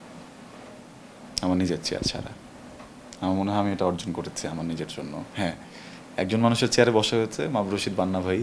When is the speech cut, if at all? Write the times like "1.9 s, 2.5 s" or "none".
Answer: none